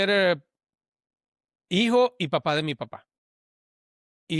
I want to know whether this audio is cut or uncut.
uncut